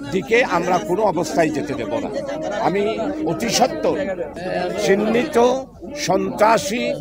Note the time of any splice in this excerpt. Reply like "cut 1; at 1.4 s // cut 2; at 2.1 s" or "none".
cut 1; at 4.4 s